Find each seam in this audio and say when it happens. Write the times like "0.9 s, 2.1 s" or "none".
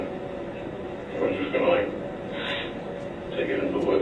3.1 s